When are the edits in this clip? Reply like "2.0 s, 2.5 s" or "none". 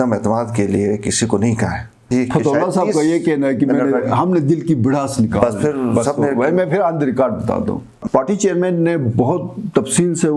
2.1 s, 7.9 s